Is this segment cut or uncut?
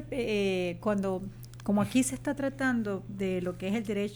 uncut